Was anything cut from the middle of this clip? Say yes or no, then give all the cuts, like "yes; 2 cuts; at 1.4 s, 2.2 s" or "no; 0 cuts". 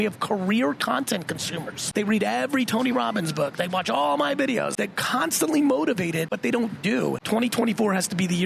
yes; 4 cuts; at 1.7 s, 4.7 s, 6.3 s, 7.2 s